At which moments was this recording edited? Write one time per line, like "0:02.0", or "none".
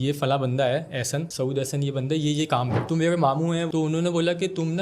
0:02.8
0:03.7